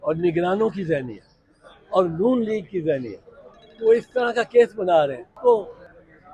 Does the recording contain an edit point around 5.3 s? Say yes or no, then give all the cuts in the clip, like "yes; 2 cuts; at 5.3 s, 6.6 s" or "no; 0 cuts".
yes; 1 cut; at 5.3 s